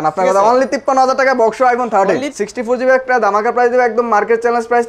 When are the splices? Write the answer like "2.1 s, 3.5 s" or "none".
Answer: 2.3 s